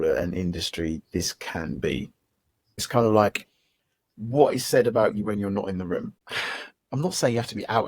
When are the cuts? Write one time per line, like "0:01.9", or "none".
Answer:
0:02.8
0:06.2